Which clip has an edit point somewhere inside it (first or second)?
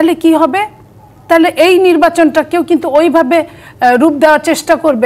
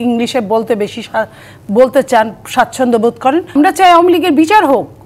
second